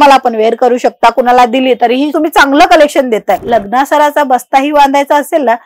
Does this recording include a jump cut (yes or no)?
yes